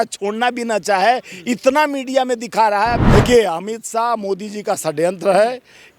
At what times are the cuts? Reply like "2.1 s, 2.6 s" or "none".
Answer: 3.0 s